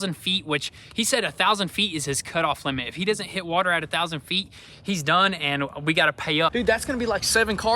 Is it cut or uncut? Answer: cut